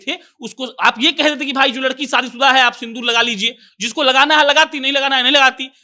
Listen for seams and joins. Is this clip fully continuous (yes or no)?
yes